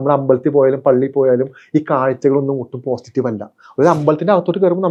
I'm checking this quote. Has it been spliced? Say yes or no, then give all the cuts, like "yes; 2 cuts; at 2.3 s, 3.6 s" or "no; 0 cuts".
no; 0 cuts